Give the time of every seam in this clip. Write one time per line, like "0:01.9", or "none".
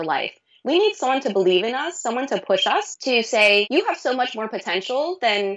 0:02.9
0:03.7